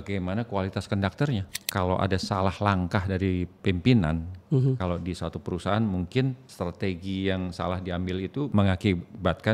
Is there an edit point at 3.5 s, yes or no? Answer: no